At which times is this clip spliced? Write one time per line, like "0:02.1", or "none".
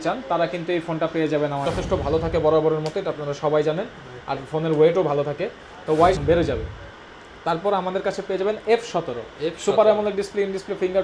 0:01.6
0:06.2